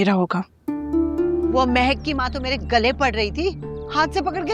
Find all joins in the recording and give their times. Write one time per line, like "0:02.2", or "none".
0:01.5